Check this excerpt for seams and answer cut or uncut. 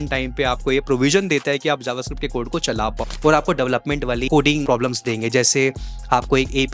cut